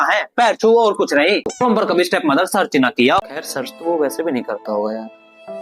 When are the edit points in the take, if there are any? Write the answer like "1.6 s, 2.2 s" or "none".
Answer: 1.5 s, 3.4 s

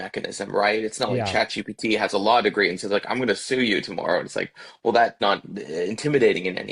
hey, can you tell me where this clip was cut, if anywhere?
5.1 s

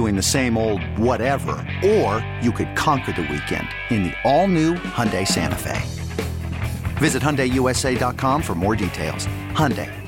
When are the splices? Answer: none

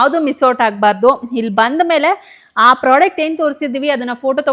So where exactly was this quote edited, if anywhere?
none

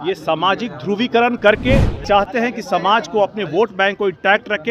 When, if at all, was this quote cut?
2.0 s

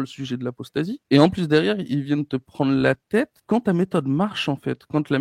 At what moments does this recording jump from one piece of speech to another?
1.0 s, 3.4 s

